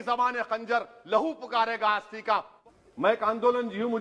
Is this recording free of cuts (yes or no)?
no